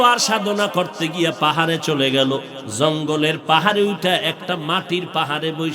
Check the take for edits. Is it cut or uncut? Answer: cut